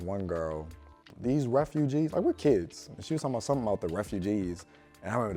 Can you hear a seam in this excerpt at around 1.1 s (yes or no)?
yes